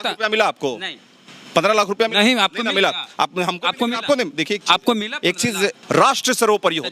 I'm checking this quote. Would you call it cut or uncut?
cut